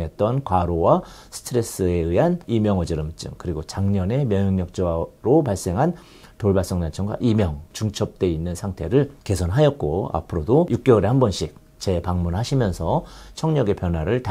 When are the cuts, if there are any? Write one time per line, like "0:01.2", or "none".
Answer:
none